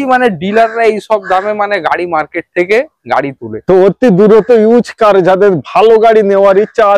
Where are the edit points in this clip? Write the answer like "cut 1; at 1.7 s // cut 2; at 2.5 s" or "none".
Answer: none